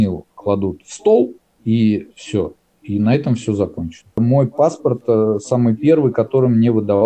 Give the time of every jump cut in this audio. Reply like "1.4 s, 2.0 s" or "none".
4.2 s